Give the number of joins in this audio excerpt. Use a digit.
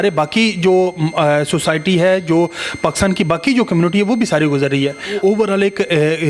1